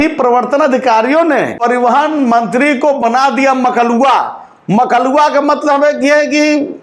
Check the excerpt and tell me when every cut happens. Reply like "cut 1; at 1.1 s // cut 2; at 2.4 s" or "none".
cut 1; at 1.5 s